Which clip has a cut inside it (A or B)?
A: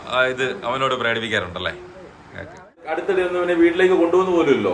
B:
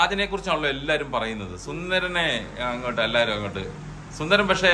A